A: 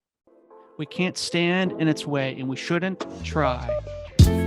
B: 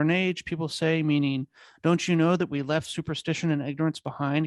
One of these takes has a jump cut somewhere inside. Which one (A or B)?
A